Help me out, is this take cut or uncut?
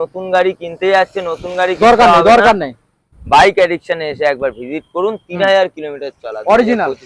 uncut